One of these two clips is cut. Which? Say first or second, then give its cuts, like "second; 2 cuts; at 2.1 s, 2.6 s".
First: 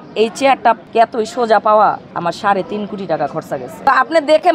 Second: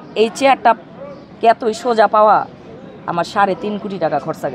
first; 3 cuts; at 0.8 s, 2.1 s, 3.9 s